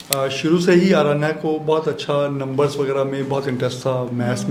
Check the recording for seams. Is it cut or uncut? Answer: uncut